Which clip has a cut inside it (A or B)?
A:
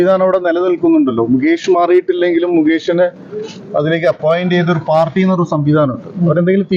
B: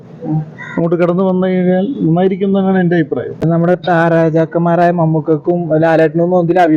B